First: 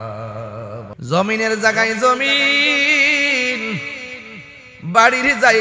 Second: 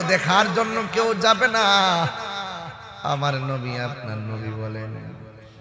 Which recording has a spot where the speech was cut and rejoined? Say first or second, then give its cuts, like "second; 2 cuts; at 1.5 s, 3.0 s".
first; 1 cut; at 0.9 s